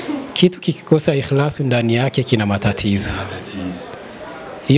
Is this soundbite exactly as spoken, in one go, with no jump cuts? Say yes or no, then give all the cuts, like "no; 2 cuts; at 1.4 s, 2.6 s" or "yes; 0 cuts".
yes; 0 cuts